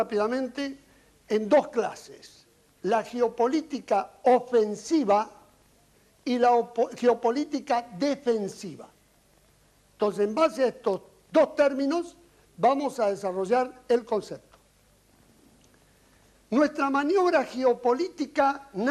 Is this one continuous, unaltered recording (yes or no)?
yes